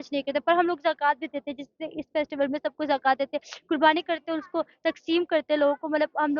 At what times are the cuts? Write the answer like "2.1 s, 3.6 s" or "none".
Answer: none